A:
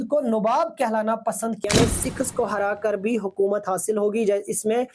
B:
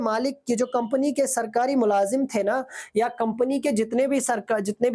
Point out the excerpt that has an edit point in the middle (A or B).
A